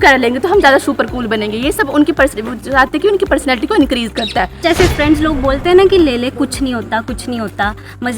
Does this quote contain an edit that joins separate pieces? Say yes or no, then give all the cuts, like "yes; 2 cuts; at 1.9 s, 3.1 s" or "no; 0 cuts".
yes; 1 cut; at 4.6 s